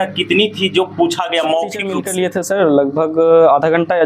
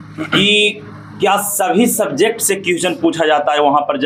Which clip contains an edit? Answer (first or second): first